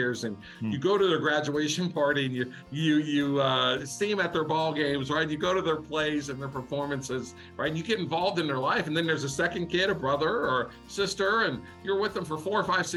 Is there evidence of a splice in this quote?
no; 0 cuts

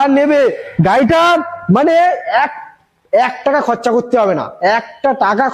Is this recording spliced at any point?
no; 0 cuts

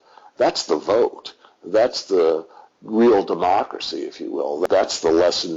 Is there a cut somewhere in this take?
yes; 1 cut; at 4.6 s

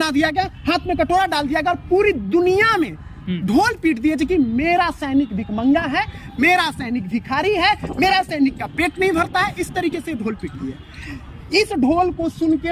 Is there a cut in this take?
no; 0 cuts

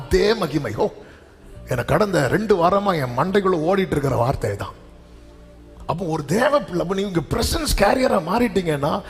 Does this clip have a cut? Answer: no; 0 cuts

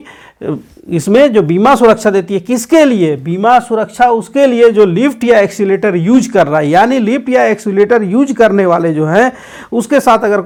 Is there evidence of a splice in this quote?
no; 0 cuts

